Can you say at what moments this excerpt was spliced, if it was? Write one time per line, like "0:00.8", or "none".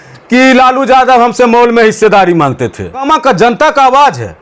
0:03.1

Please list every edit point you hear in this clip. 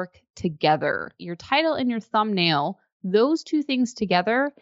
0:01.3

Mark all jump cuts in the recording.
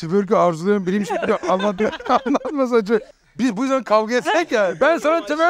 0:03.1

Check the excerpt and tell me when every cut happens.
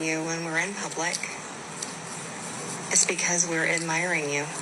none

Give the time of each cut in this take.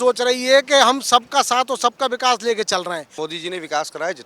0:03.3

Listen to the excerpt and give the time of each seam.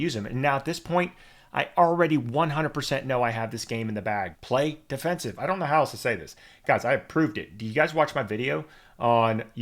0:04.4

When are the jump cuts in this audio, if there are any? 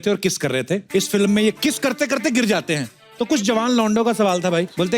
0:00.8
0:01.6

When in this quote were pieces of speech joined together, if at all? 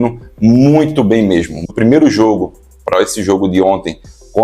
0:01.6

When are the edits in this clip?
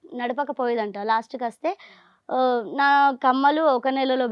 none

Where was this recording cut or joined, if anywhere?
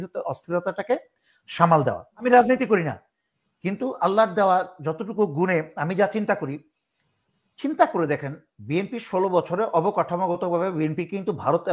0:02.2

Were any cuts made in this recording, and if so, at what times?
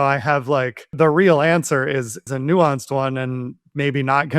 0:00.9
0:02.3

